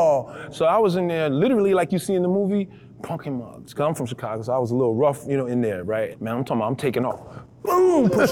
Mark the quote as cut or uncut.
cut